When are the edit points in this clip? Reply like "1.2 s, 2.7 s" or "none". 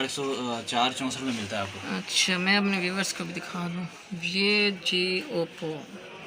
none